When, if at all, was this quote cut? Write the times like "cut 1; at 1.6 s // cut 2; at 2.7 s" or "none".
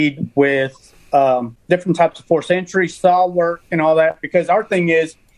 cut 1; at 1.5 s